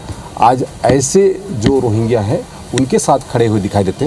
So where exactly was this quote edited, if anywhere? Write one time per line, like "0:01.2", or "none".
none